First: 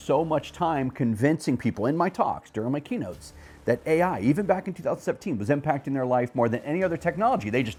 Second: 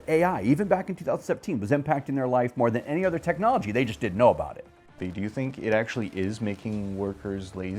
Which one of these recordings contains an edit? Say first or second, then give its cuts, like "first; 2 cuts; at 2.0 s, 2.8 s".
second; 1 cut; at 5.0 s